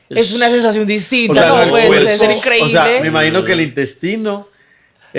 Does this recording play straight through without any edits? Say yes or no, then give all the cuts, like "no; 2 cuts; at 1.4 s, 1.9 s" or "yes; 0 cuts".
yes; 0 cuts